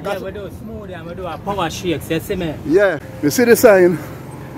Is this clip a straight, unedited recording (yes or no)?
no